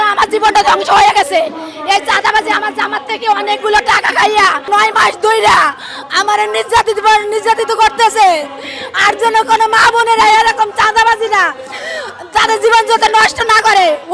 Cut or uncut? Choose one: cut